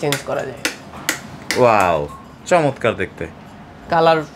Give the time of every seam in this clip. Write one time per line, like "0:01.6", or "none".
none

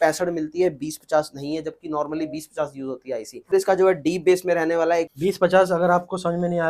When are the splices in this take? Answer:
0:03.5
0:05.1

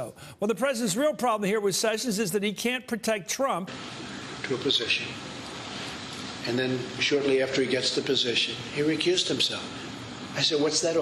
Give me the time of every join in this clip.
none

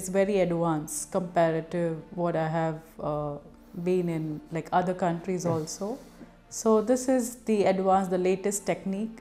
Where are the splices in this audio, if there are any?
none

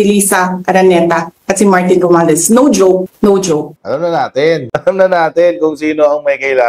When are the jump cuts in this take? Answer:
0:03.7

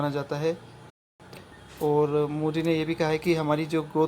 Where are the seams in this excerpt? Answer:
0:01.3

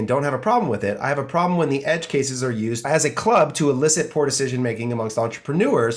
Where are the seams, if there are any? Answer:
0:02.9

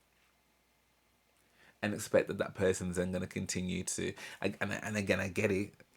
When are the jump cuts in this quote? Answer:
none

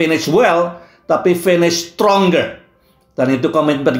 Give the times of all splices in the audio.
none

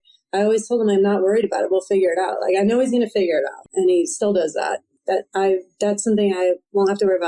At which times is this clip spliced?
0:03.6
0:04.9

